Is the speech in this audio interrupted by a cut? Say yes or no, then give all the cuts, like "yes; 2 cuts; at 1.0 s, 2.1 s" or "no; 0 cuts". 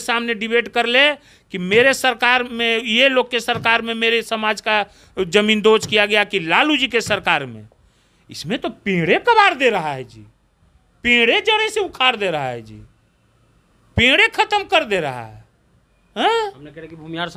no; 0 cuts